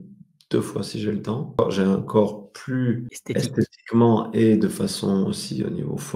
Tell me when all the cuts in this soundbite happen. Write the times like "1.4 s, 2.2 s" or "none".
1.6 s, 3.1 s